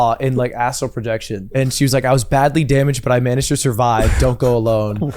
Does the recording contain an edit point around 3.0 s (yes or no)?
no